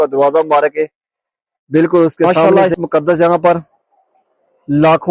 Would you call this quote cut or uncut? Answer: cut